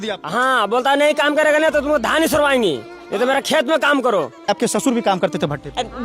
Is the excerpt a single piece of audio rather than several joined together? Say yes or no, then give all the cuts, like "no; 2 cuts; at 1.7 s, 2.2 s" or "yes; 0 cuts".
no; 1 cut; at 4.5 s